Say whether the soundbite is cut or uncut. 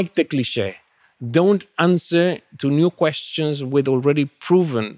uncut